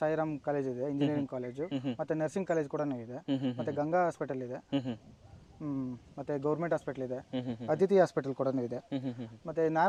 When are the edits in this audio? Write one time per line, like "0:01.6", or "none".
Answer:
none